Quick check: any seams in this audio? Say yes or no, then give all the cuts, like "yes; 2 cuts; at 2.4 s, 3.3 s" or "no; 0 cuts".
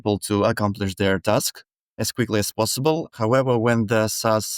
yes; 2 cuts; at 2.1 s, 3.1 s